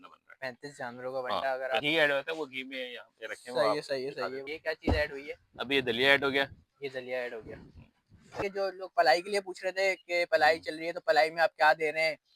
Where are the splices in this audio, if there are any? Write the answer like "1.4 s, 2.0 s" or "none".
1.8 s, 4.4 s, 8.4 s